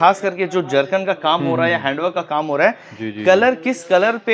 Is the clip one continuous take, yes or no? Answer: yes